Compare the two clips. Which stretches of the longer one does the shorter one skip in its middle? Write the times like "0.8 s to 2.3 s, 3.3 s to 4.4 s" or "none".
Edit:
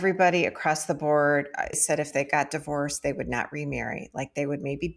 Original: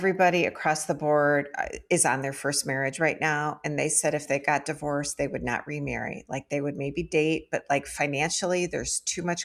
1.8 s to 4.0 s